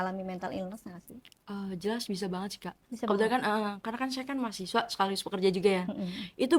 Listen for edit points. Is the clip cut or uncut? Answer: uncut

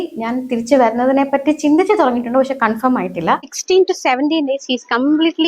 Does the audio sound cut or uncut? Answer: cut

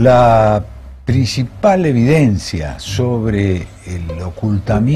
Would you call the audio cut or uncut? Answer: cut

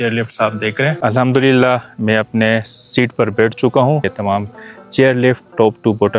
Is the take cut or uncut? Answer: cut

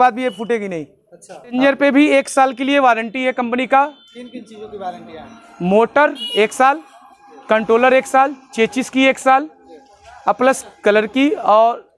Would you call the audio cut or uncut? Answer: cut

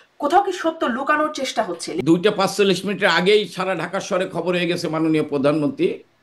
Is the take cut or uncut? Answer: cut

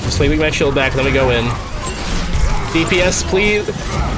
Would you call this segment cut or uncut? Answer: uncut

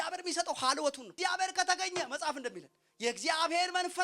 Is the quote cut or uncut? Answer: cut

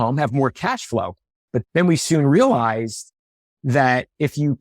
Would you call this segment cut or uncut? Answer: cut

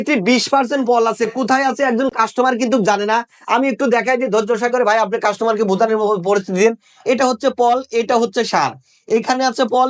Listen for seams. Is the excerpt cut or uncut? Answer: uncut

